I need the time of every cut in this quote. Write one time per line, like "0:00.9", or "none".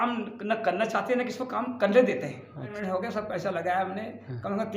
0:02.8

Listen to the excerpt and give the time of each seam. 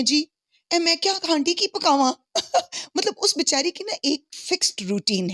none

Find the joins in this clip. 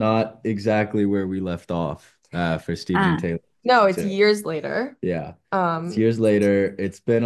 none

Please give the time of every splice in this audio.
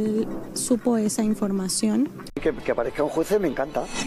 0:02.2

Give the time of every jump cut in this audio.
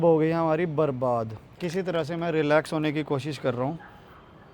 0:01.5

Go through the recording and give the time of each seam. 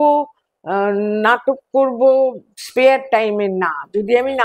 none

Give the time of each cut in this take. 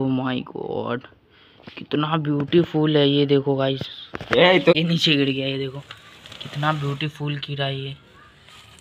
0:04.7

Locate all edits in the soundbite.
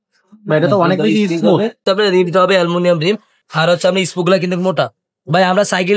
0:01.8

